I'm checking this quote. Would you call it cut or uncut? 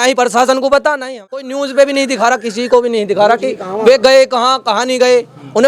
cut